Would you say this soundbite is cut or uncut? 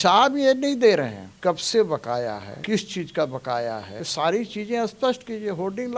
cut